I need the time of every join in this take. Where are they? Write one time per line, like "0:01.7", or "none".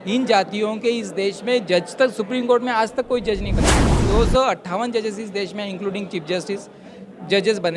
0:04.0